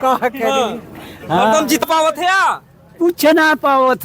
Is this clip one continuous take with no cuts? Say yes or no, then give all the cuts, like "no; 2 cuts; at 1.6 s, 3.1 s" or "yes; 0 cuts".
no; 1 cut; at 1.8 s